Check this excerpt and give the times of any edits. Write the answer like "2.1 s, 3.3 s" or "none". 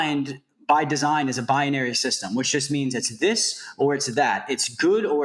none